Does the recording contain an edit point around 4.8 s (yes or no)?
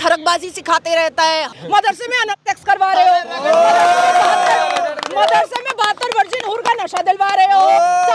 no